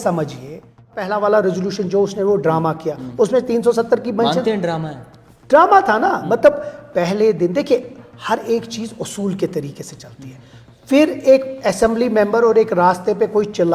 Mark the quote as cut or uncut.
cut